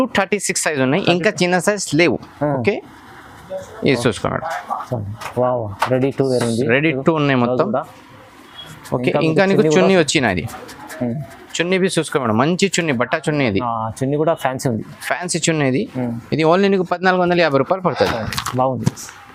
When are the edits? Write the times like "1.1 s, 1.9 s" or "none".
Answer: none